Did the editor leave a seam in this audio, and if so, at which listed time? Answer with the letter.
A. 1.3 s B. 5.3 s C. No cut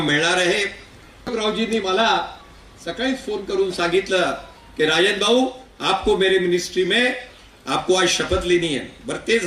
A